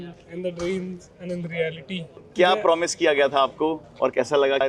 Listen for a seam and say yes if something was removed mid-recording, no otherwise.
no